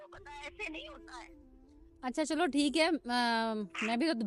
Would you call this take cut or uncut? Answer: uncut